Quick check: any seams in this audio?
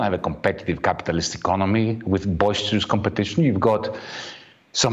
no; 0 cuts

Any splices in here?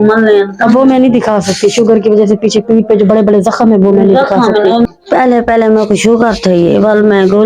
yes; 1 cut; at 4.9 s

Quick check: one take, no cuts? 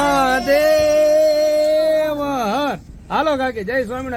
yes; 0 cuts

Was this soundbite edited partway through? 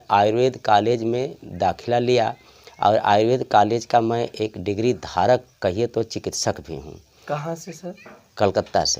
no; 0 cuts

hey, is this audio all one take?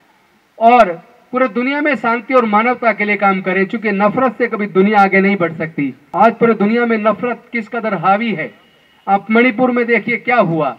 no; 1 cut; at 6.0 s

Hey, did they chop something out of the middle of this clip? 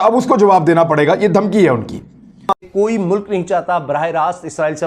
yes; 1 cut; at 2.3 s

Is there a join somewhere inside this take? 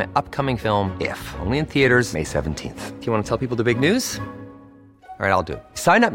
no; 0 cuts

